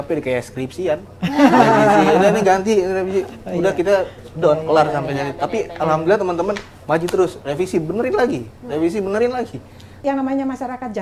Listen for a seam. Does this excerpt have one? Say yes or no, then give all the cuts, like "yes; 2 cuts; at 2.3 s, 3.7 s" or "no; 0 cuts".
yes; 1 cut; at 10.0 s